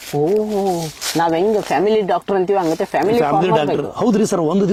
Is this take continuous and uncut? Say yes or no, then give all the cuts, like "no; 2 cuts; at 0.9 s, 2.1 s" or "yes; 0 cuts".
yes; 0 cuts